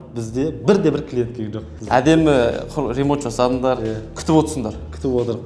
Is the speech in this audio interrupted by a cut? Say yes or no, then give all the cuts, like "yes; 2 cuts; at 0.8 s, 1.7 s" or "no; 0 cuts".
yes; 1 cut; at 1.7 s